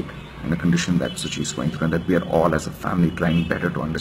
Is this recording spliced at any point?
no; 0 cuts

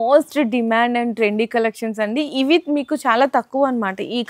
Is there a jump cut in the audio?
no; 0 cuts

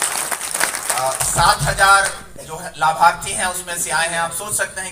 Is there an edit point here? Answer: no; 0 cuts

